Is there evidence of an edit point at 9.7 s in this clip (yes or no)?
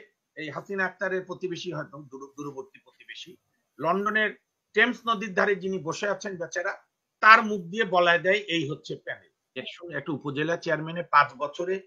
yes